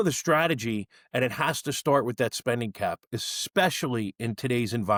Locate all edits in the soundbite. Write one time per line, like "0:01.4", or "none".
none

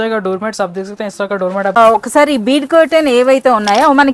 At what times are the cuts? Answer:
0:01.8

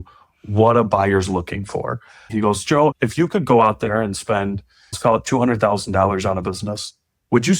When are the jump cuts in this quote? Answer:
0:02.2
0:05.0

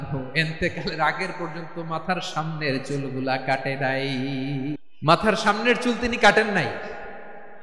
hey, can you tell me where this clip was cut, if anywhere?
0:04.9

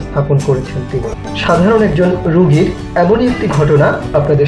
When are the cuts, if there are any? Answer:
0:01.1

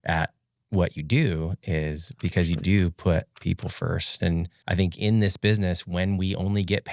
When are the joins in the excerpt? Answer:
0:04.5

